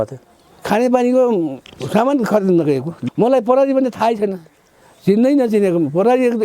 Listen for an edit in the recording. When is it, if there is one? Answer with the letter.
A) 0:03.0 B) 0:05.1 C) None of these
A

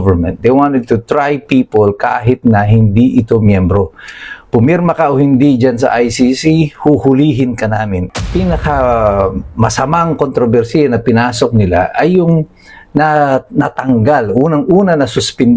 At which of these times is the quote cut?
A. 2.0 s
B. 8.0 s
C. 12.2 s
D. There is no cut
B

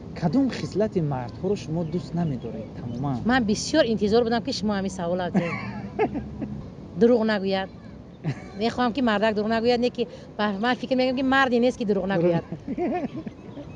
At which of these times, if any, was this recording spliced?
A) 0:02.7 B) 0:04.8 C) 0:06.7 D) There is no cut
C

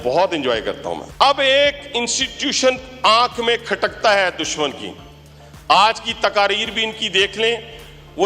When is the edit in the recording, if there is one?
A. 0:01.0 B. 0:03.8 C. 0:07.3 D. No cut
D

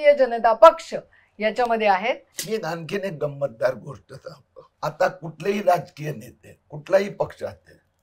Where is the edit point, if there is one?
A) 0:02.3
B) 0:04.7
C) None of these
A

